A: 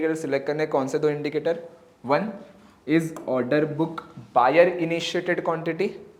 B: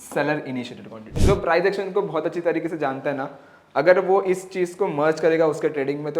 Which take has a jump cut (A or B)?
B